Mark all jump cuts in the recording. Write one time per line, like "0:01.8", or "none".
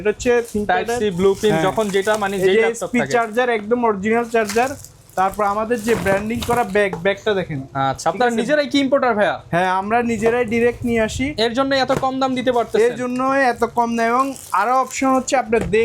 none